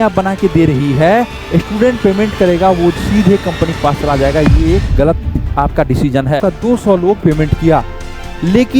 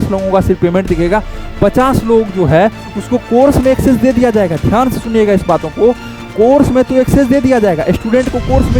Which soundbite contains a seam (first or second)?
first